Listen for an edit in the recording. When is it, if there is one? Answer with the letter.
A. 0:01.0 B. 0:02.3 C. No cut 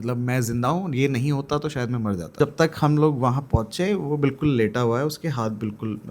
B